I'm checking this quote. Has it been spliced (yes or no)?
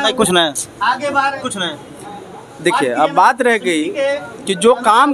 no